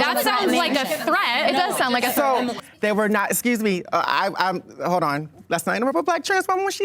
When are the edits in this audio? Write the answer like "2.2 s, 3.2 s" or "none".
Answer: 2.6 s